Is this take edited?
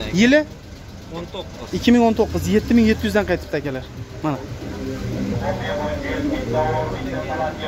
no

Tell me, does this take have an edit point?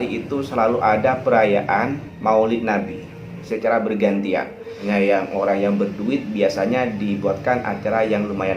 yes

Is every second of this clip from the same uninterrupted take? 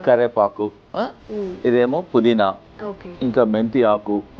yes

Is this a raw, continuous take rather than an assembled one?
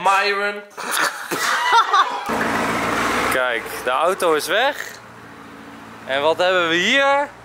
no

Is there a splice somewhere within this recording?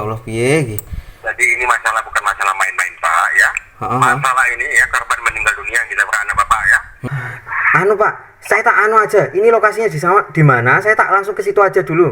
yes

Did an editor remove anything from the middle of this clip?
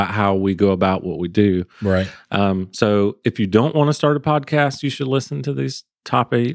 no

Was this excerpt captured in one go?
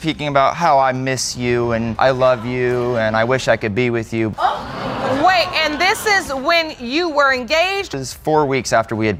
yes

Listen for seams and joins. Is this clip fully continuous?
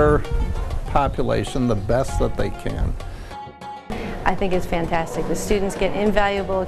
no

